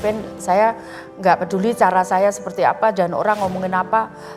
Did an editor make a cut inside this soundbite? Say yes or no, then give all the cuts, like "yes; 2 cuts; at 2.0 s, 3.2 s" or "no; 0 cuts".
no; 0 cuts